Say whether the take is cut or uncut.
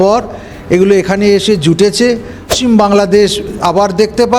cut